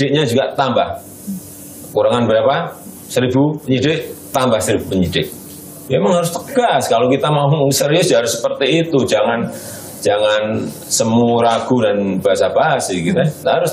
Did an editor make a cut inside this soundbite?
no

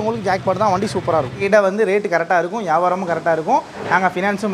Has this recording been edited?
yes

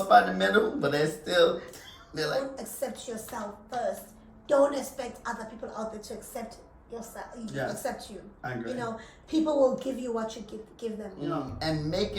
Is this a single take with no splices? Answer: no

